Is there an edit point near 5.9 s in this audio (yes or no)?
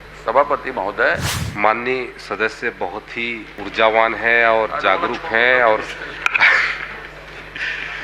no